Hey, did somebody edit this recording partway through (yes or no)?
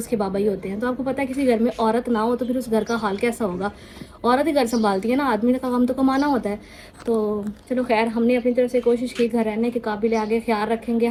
no